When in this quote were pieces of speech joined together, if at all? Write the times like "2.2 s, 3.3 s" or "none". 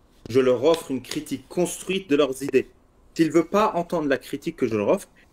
none